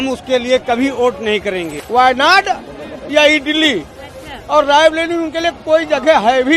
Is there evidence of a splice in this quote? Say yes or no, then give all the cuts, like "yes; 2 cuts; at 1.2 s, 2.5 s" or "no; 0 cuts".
yes; 1 cut; at 1.8 s